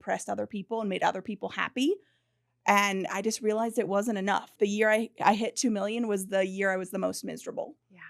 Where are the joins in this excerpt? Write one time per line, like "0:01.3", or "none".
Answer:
none